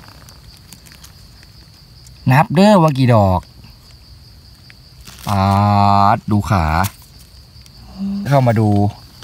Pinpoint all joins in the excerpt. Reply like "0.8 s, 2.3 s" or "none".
8.3 s